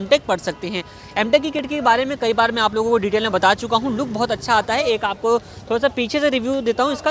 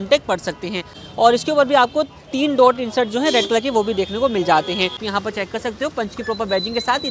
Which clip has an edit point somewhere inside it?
second; 2 cuts; at 1.0 s, 5.1 s

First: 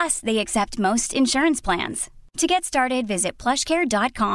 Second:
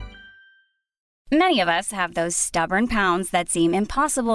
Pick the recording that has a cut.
second; 1 cut; at 1.1 s

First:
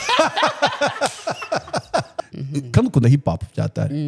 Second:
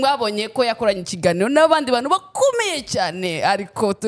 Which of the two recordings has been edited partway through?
first; 1 cut; at 2.2 s

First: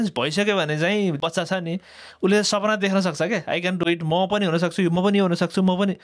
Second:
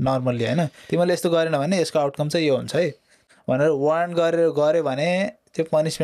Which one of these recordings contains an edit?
second; 1 cut; at 3.1 s

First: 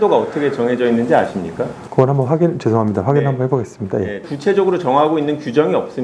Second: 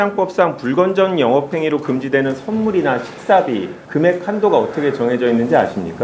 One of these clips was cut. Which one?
first; 1 cut; at 4.2 s

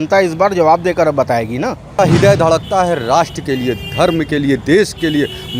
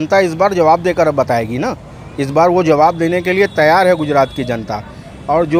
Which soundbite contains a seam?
first; 1 cut; at 2.0 s

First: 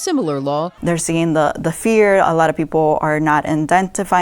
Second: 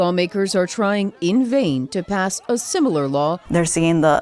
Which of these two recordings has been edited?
second; 1 cut; at 1.3 s

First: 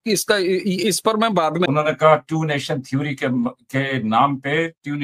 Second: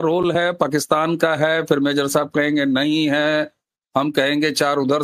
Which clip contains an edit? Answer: first; 1 cut; at 1.7 s

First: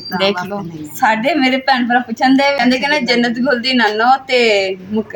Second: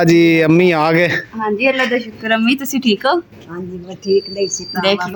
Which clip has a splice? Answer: first; 1 cut; at 2.6 s

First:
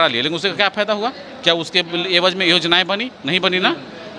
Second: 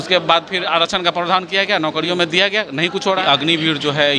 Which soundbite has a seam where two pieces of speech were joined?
second; 1 cut; at 3.2 s

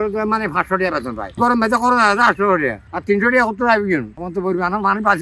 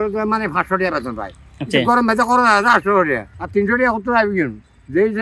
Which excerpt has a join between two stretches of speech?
first; 2 cuts; at 1.4 s, 4.2 s

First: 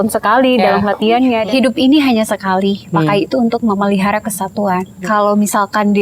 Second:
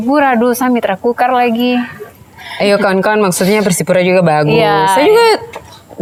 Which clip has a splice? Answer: first; 2 cuts; at 1.4 s, 4.9 s

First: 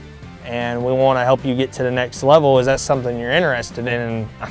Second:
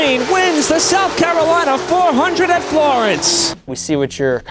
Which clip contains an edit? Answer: second; 1 cut; at 3.5 s

